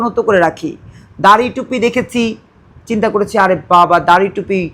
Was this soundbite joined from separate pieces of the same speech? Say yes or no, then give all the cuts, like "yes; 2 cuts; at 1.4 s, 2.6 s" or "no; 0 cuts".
no; 0 cuts